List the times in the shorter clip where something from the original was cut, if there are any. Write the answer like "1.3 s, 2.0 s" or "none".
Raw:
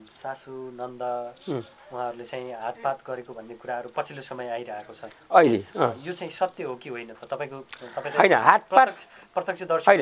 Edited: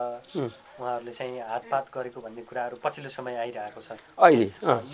none